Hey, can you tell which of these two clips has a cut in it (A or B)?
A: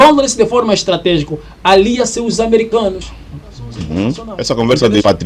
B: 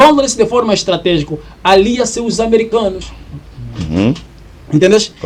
A